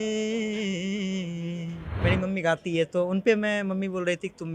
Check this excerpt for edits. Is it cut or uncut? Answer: cut